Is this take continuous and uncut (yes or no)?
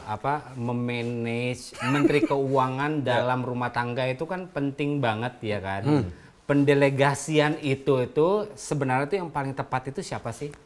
yes